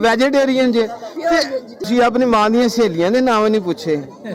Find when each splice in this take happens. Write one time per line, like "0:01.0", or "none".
0:01.9